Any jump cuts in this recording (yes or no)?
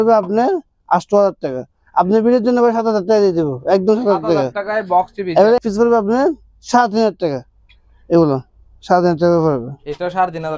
yes